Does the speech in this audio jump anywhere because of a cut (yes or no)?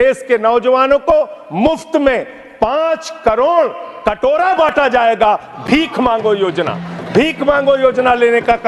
no